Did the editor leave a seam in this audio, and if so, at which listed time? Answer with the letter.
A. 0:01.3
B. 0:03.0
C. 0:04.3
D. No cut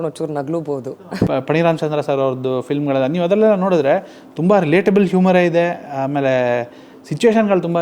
A